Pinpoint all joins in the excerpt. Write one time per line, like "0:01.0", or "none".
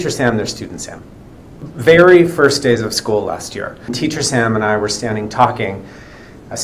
0:01.7
0:03.9